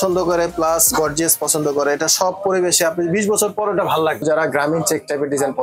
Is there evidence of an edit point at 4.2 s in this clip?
yes; 1 cut; at 4.2 s

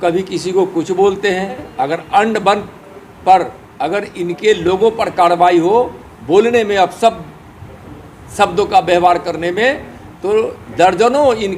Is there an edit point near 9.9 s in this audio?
no; 1 cut; at 1.7 s

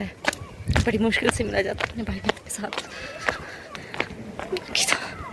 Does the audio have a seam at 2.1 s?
no; 1 cut; at 3.7 s

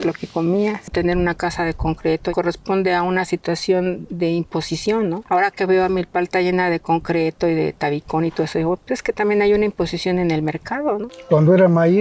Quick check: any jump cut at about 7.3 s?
no; 4 cuts; at 0.9 s, 2.3 s, 5.2 s, 11.1 s

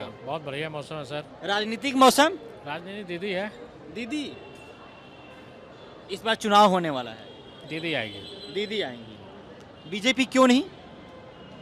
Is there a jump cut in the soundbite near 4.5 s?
no; 0 cuts

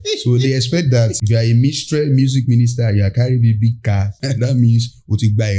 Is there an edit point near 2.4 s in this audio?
no; 2 cuts; at 1.2 s, 4.2 s

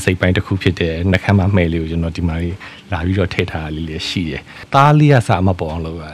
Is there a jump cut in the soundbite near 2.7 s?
no; 1 cut; at 4.6 s

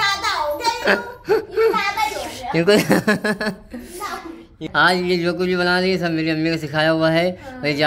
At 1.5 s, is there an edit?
no; 0 cuts

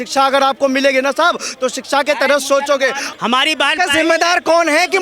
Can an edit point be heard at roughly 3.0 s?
yes; 1 cut; at 3.0 s

